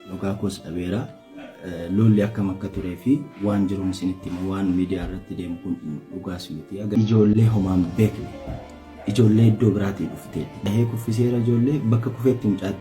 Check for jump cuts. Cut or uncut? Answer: cut